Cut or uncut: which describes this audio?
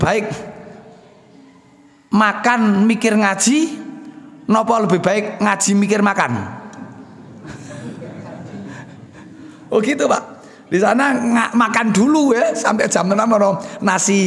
uncut